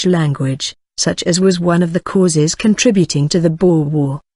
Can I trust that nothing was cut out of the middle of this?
no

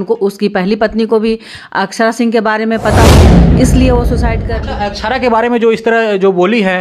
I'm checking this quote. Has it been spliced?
yes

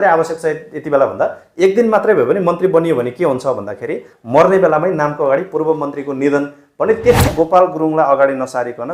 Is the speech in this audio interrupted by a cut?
yes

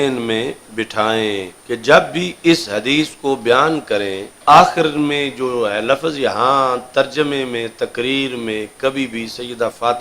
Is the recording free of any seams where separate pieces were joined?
no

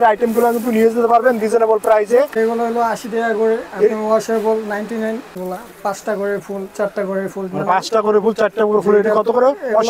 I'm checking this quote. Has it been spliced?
yes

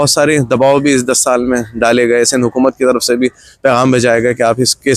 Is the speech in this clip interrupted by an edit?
no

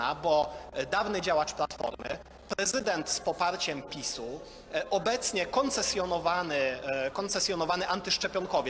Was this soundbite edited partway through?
no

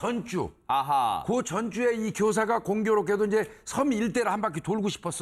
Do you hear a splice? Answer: no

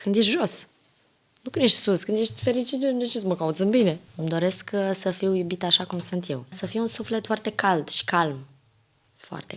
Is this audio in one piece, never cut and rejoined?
no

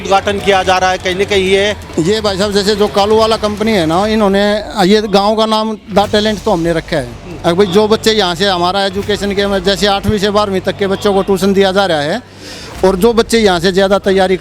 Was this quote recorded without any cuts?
no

